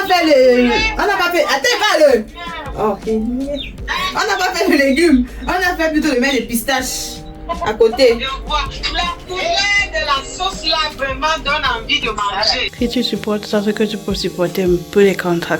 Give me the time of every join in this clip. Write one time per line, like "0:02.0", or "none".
0:12.7